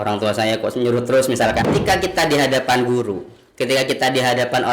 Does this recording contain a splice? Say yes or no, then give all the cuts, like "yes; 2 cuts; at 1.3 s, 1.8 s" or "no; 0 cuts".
yes; 1 cut; at 1.6 s